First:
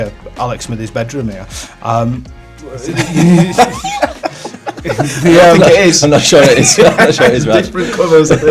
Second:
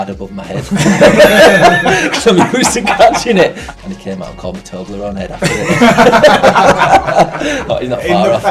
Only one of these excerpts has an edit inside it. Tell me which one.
second; 1 cut; at 3.7 s

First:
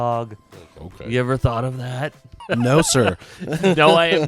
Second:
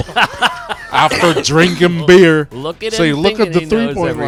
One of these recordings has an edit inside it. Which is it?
first; 1 cut; at 2.4 s

